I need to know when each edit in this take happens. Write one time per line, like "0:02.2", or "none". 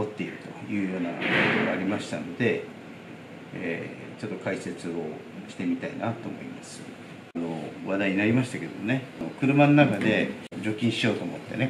0:07.4
0:09.2
0:10.5